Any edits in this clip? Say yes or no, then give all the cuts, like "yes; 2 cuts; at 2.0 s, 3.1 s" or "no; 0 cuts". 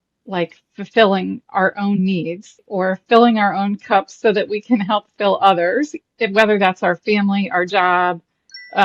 yes; 1 cut; at 2.6 s